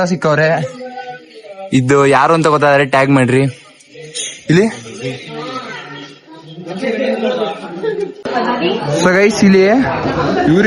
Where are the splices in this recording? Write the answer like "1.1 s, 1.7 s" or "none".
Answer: 8.2 s